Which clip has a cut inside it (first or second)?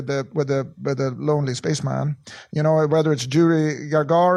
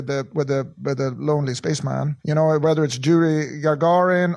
second